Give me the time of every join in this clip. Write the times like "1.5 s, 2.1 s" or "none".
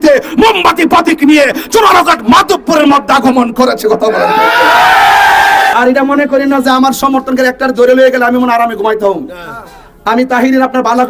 5.7 s